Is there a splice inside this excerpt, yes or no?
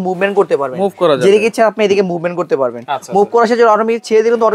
no